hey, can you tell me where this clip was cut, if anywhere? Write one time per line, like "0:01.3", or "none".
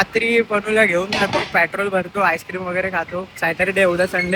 none